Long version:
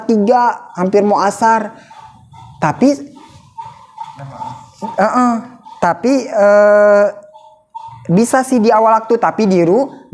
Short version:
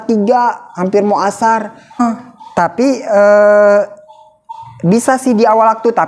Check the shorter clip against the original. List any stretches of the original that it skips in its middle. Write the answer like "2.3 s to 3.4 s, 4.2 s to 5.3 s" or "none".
2.0 s to 5.3 s